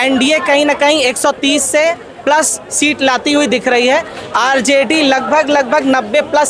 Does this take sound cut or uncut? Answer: uncut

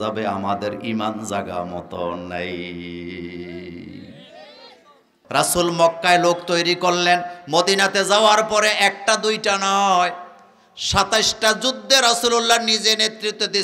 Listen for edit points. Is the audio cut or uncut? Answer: cut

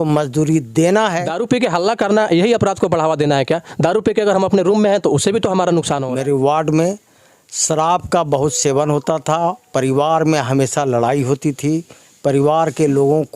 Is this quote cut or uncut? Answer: cut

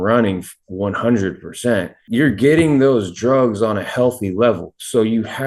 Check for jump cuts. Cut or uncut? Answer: cut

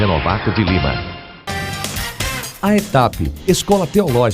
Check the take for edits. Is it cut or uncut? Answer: cut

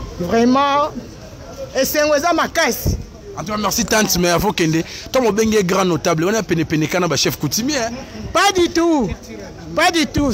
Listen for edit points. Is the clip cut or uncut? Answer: uncut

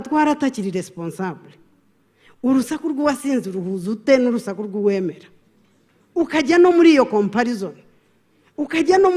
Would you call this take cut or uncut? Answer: uncut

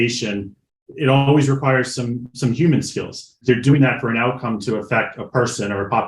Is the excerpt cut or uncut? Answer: cut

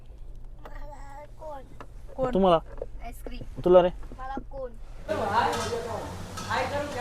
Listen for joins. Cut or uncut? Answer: cut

